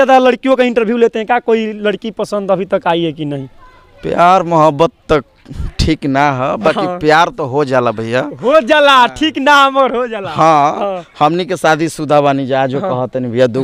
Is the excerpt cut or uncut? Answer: uncut